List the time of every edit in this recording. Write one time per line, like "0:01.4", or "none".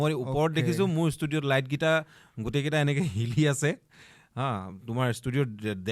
none